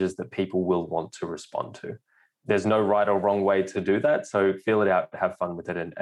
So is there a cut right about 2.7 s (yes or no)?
yes